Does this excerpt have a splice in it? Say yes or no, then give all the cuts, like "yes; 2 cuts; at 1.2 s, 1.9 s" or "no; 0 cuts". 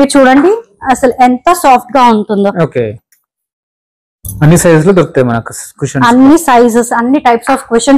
no; 0 cuts